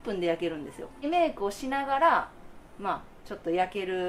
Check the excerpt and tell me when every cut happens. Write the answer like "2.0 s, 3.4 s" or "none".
1.0 s